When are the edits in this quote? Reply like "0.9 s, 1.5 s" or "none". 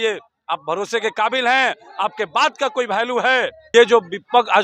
3.6 s